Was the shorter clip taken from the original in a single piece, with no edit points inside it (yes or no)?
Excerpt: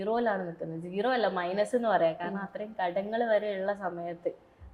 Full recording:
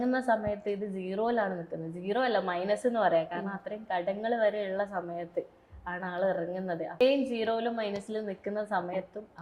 yes